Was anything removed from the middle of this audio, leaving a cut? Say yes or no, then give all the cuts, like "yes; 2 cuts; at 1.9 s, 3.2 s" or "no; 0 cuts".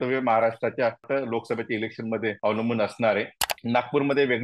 yes; 3 cuts; at 1.0 s, 2.4 s, 3.4 s